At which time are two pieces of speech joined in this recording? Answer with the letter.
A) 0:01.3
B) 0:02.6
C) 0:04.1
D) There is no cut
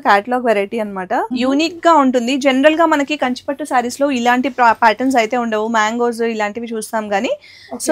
A